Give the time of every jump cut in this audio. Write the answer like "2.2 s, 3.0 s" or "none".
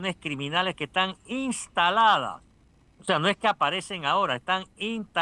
none